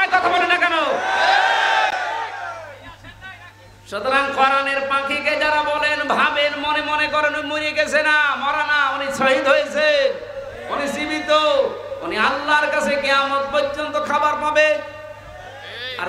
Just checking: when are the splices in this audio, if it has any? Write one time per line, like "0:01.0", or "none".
none